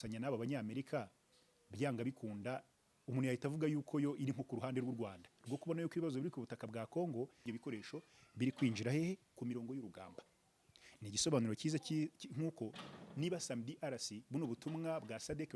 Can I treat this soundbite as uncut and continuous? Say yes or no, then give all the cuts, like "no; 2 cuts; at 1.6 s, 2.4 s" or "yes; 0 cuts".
no; 1 cut; at 7.4 s